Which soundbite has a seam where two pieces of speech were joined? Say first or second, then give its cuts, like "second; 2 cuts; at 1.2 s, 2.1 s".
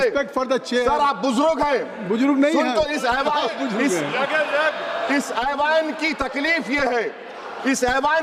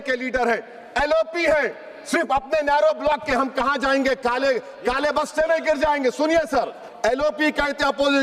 second; 1 cut; at 6.8 s